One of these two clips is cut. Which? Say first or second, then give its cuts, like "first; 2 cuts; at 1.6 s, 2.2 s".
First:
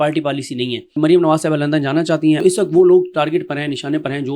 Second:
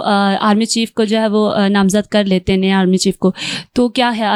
first; 2 cuts; at 0.9 s, 2.4 s